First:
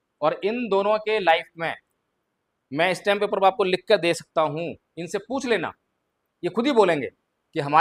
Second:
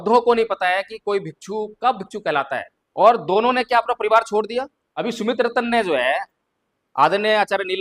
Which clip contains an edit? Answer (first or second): second